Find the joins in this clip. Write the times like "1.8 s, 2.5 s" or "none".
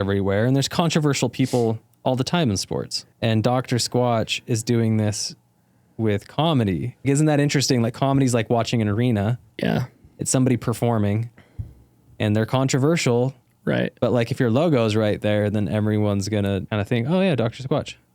3.0 s, 7.0 s, 16.7 s